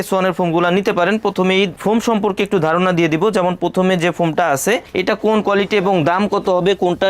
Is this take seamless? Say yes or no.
yes